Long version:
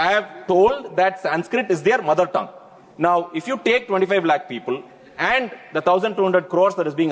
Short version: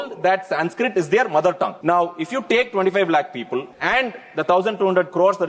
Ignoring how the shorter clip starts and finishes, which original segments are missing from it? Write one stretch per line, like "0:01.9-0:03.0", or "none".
0:02.5-0:02.9
0:04.9-0:05.1